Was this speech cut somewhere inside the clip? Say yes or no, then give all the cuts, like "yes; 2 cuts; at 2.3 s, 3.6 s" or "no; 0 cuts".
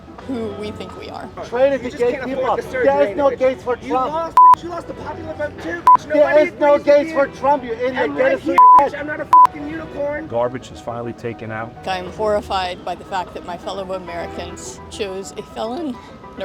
yes; 3 cuts; at 1.5 s, 10.2 s, 11.8 s